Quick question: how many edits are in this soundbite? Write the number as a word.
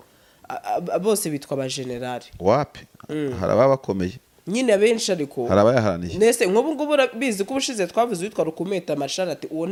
zero